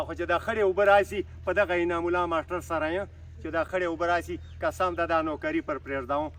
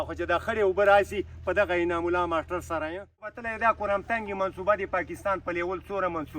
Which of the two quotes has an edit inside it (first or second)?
second